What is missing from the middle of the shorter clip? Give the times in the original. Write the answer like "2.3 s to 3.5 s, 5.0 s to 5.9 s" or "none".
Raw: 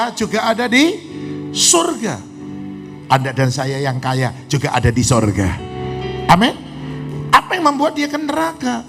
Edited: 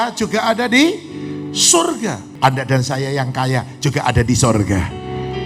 2.3 s to 2.9 s